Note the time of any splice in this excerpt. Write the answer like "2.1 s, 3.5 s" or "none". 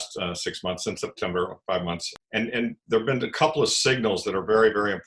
2.1 s